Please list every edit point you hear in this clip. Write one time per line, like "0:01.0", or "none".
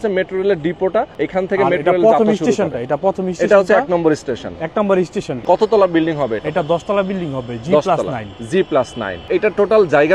0:01.1
0:05.4
0:09.3